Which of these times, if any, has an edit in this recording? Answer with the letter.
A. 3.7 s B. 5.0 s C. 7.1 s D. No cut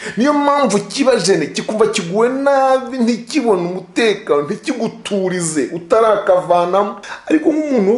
C